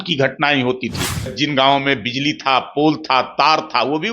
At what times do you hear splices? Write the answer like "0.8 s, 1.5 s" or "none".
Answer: 1.4 s